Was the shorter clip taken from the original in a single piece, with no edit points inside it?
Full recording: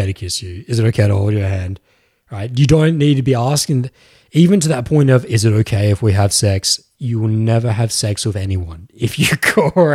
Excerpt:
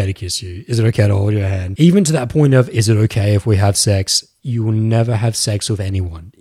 no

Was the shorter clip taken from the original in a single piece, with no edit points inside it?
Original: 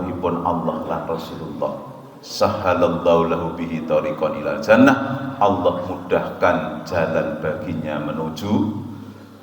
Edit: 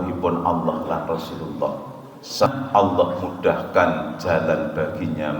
no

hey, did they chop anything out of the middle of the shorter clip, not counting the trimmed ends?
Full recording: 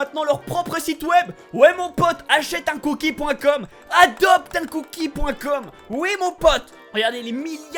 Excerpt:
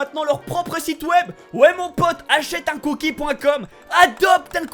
no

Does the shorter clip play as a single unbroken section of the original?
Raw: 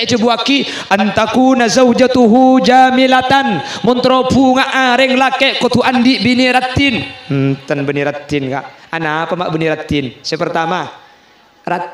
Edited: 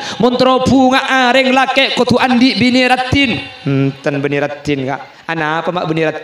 yes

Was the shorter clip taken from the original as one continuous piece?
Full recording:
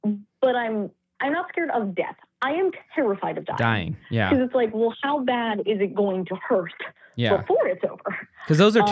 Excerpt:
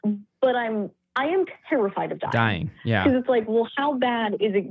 no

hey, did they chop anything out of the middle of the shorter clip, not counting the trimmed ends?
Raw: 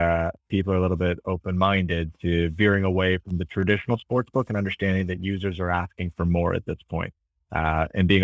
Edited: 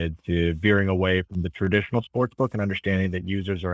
no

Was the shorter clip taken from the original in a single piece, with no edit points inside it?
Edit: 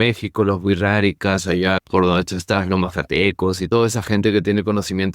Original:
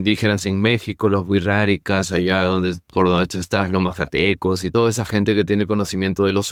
no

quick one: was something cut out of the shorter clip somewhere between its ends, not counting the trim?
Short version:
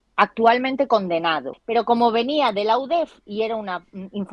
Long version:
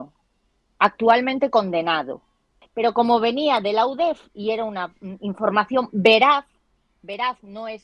yes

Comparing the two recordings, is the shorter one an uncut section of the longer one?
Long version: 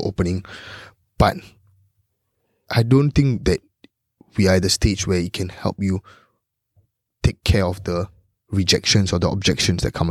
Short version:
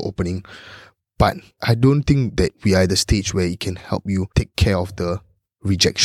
no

